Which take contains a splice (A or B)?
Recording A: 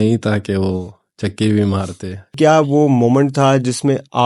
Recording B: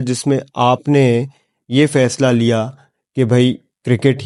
A